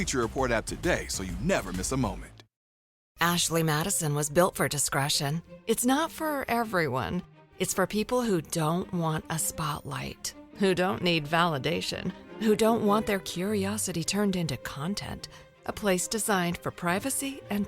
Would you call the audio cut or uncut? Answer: cut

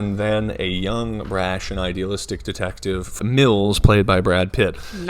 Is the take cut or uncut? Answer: cut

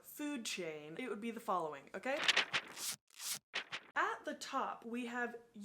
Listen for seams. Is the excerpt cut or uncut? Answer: cut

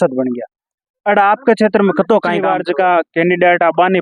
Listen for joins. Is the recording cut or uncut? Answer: cut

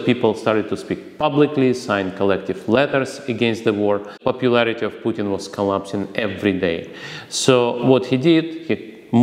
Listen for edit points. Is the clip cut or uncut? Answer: cut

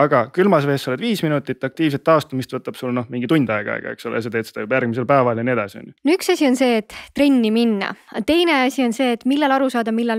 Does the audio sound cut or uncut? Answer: cut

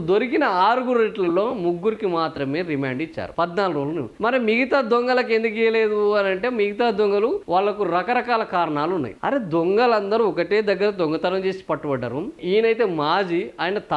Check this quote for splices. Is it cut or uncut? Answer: uncut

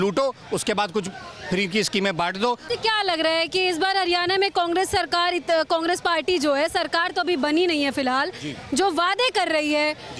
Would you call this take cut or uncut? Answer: uncut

